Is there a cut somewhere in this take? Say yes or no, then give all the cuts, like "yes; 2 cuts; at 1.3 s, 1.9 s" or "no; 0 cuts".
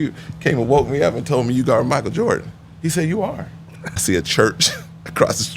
yes; 1 cut; at 4.0 s